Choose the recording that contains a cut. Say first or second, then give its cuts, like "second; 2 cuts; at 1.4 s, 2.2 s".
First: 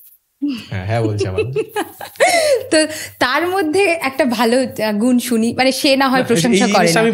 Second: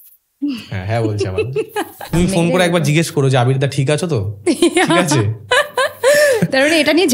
second; 1 cut; at 2.1 s